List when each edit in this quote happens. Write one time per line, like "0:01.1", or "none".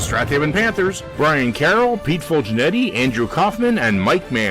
0:01.0